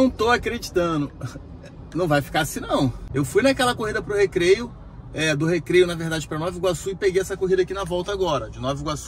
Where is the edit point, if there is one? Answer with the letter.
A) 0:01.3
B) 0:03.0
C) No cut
B